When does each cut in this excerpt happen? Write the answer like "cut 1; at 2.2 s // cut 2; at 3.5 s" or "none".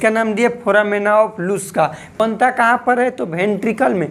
cut 1; at 2.1 s